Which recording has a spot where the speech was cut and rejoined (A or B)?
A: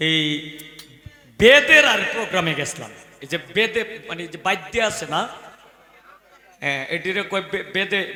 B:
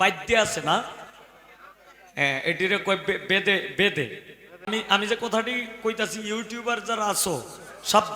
B